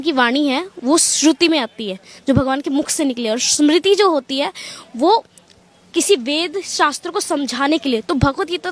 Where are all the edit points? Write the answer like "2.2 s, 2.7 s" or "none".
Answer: none